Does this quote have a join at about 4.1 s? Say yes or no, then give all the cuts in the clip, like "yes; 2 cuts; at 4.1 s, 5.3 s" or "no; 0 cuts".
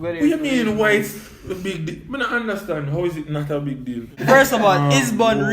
yes; 1 cut; at 4.1 s